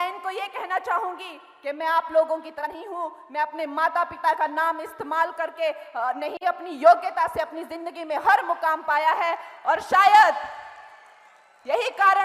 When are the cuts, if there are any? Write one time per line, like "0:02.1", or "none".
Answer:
none